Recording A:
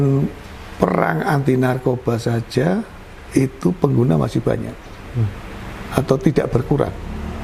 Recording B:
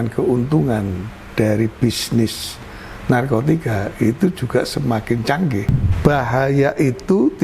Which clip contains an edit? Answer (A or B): B